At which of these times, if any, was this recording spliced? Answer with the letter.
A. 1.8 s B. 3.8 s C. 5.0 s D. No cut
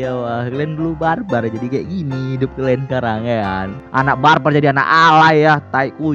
B